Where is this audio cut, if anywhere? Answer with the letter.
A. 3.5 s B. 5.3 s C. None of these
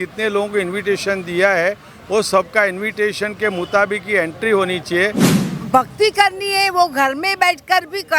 B